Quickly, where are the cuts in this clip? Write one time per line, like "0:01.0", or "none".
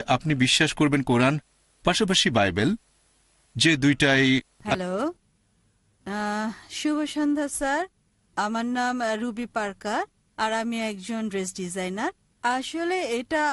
0:04.6